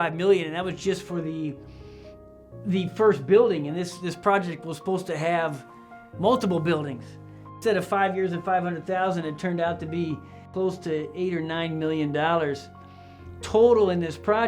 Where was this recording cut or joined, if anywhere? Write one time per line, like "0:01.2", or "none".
0:07.6
0:10.5